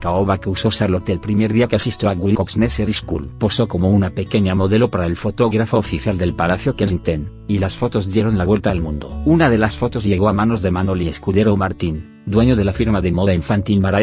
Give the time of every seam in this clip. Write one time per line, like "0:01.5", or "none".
0:03.6